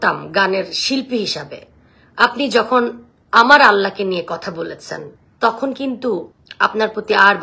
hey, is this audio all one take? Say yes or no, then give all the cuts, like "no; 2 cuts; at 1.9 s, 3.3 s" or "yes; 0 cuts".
yes; 0 cuts